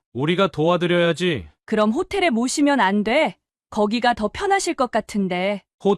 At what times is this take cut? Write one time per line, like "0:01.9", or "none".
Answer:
none